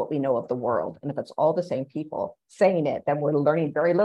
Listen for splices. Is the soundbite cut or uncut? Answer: cut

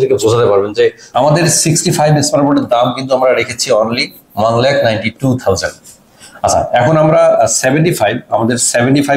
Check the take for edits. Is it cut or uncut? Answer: cut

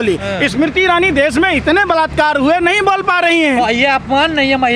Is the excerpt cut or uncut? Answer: uncut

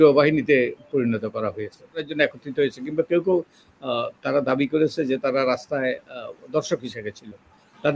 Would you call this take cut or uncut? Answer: cut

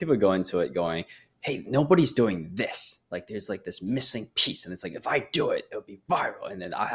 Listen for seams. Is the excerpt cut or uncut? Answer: uncut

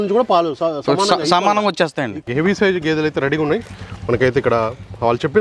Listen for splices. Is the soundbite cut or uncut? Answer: cut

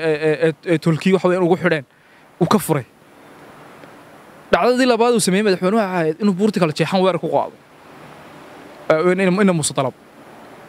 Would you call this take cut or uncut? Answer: uncut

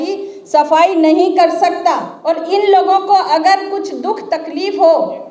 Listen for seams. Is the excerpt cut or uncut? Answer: cut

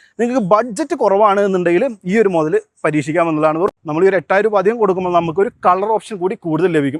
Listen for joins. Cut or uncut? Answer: cut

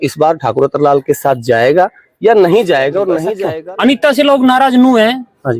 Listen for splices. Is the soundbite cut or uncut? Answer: cut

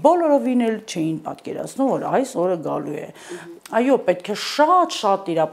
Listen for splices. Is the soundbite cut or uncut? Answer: uncut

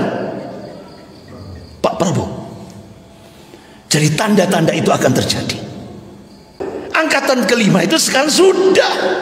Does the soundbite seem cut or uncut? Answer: cut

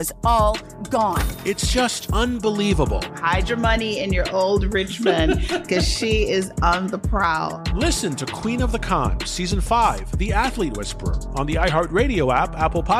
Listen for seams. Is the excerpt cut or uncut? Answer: uncut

